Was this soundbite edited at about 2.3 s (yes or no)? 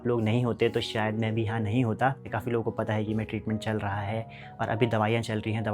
yes